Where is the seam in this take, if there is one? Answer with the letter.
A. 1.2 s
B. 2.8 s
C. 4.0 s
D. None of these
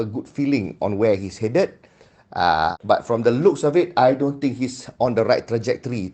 B